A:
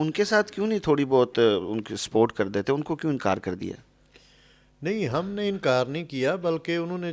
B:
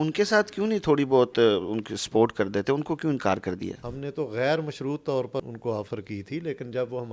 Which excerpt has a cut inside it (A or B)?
B